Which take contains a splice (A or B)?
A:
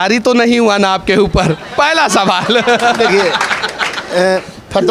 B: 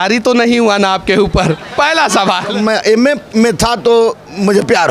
B